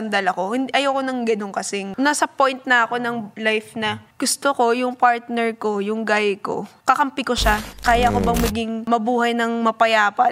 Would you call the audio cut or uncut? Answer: cut